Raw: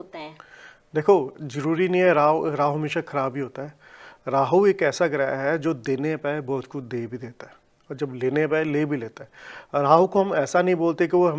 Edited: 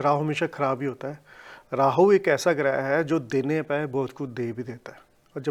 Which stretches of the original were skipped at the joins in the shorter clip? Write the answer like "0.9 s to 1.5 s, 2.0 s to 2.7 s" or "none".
none